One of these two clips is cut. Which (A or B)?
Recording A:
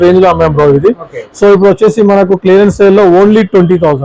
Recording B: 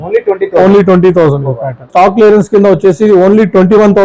B